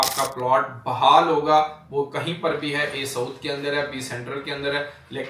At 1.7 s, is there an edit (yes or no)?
no